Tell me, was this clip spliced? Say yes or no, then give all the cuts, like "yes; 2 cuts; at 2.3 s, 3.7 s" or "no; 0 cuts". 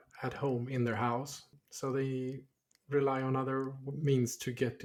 no; 0 cuts